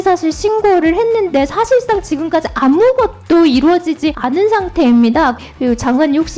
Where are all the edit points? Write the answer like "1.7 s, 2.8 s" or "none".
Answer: 4.2 s, 5.4 s